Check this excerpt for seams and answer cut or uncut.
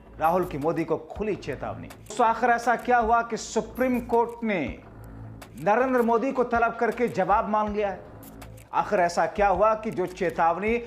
cut